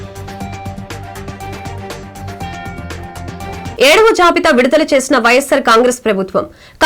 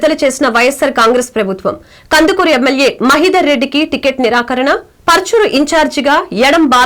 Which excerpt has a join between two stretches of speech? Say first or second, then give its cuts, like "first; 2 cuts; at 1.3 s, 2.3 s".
first; 1 cut; at 3.7 s